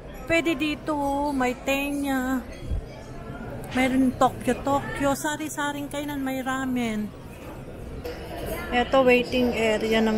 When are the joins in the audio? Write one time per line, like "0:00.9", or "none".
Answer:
0:08.1

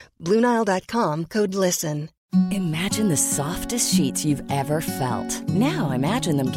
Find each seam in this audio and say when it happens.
0:02.2

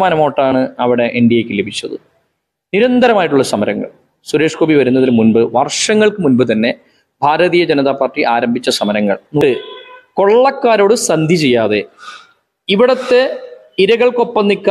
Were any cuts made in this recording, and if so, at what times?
0:09.4

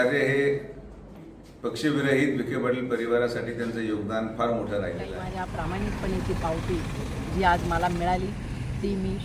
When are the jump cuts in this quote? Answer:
0:01.2
0:05.3

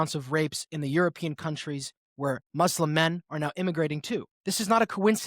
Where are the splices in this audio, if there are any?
0:04.3

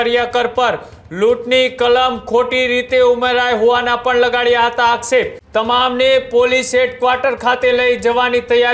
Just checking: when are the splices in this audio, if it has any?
0:05.4

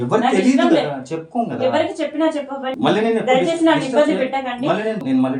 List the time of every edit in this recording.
0:02.7

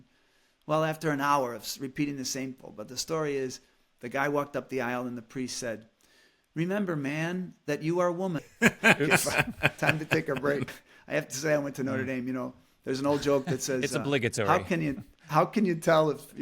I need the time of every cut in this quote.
0:02.6
0:08.5
0:10.9

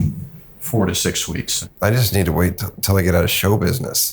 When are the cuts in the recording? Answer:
0:01.6

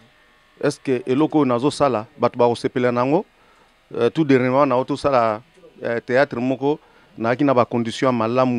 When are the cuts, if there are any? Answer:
none

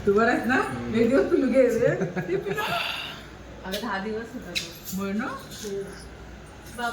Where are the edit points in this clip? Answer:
none

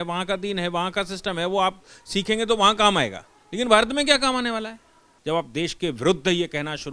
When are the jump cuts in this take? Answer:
0:05.1

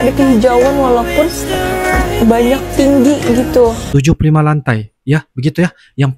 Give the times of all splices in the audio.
0:03.8

